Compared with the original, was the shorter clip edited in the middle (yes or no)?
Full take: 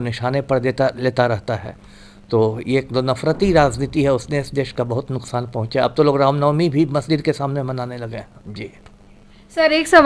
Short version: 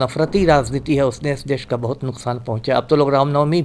no